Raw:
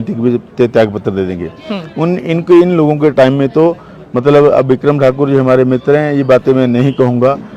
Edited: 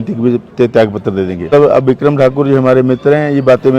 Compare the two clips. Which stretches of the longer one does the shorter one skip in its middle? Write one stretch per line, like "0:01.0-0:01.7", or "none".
0:01.5-0:04.3